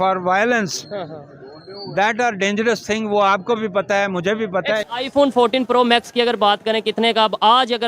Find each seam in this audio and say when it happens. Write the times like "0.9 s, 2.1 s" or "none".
4.9 s